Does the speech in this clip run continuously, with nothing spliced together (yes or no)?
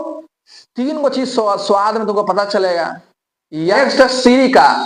no